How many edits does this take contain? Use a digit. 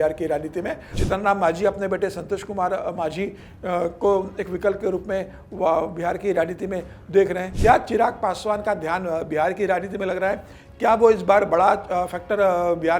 2